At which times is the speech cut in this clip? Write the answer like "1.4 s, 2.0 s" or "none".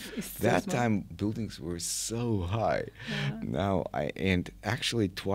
none